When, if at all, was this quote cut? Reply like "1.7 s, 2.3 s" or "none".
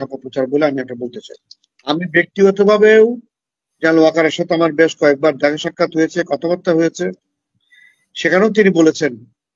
1.7 s